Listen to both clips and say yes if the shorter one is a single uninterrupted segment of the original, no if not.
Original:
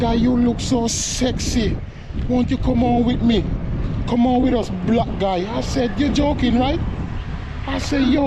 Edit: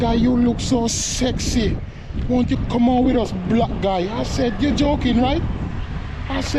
no